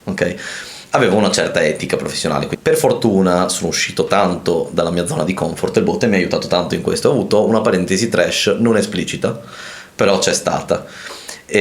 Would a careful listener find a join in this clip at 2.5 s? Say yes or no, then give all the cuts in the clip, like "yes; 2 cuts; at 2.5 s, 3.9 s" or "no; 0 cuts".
yes; 1 cut; at 2.5 s